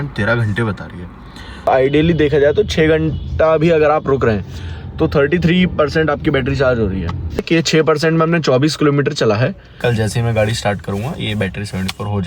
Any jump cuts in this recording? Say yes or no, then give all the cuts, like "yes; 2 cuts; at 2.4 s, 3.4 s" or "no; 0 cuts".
yes; 3 cuts; at 1.7 s, 7.4 s, 9.8 s